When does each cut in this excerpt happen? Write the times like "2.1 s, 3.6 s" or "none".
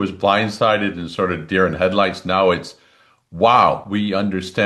none